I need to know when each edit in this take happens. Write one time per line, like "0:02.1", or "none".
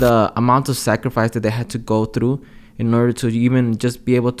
none